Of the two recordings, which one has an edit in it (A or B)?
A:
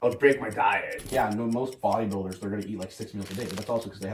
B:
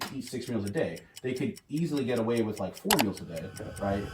A